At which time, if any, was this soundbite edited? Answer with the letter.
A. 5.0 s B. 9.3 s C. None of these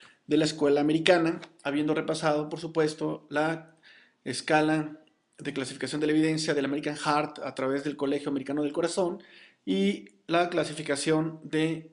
B